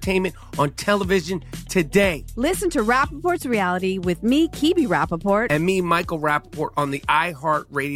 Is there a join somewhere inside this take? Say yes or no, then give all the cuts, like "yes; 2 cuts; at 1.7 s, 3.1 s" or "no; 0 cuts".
no; 0 cuts